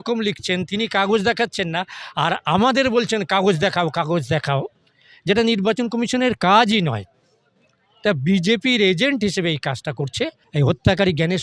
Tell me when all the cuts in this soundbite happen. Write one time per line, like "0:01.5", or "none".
0:10.4